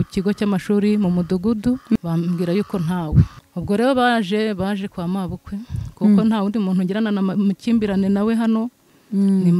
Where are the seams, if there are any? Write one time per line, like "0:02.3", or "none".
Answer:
0:01.9
0:03.4